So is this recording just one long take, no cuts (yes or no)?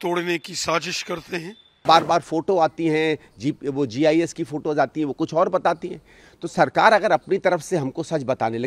no